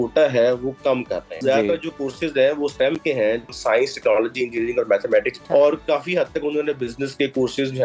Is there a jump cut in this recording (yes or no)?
yes